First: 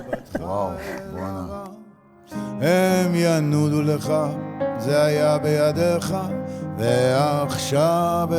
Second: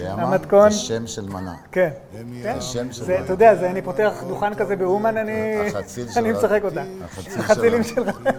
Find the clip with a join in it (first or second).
first